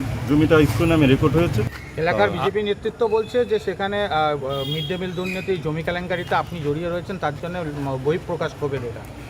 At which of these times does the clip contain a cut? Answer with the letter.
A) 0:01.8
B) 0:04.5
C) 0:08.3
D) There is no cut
A